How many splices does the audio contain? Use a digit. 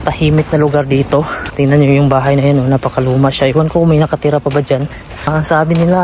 2